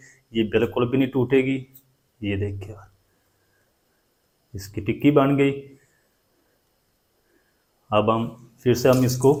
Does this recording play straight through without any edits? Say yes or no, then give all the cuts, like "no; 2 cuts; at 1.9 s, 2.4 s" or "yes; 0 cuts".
yes; 0 cuts